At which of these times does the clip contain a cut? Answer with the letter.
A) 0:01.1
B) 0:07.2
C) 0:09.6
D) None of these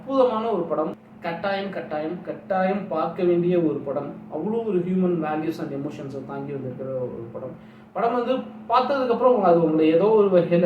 A